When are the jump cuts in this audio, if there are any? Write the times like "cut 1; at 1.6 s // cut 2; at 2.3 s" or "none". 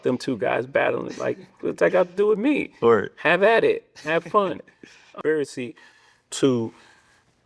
cut 1; at 5.0 s